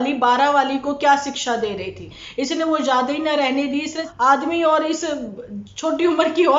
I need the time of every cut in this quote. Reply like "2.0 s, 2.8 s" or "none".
2.2 s, 4.0 s